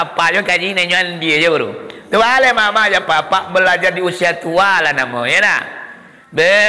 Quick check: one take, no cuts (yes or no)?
yes